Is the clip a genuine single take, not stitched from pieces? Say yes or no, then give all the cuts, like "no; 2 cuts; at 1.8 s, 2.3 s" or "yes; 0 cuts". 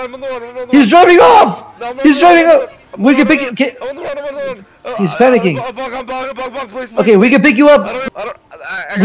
no; 1 cut; at 7.9 s